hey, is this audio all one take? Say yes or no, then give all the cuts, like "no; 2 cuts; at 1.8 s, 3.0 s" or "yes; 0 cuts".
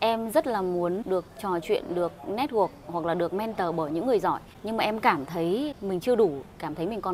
no; 3 cuts; at 1.0 s, 4.5 s, 5.8 s